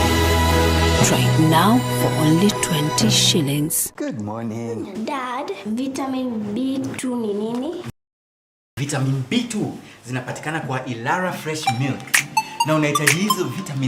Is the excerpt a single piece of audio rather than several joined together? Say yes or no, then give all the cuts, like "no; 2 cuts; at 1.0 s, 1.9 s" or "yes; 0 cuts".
yes; 0 cuts